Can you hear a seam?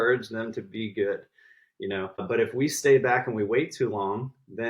yes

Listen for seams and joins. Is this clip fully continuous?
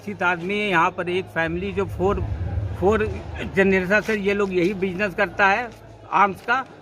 yes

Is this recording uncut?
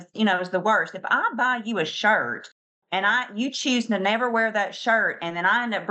yes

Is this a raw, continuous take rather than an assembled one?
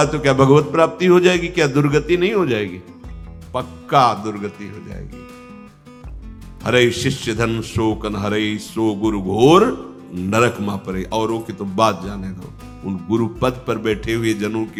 yes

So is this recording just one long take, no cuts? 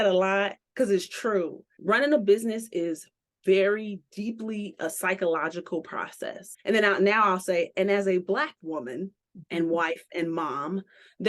no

